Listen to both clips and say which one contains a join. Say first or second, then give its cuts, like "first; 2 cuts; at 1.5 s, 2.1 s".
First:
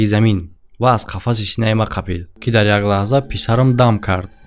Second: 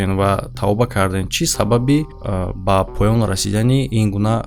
first; 1 cut; at 2.3 s